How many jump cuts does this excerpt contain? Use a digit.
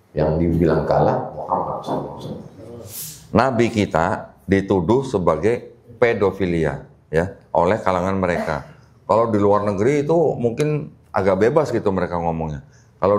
1